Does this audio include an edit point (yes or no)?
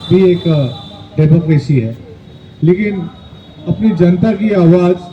no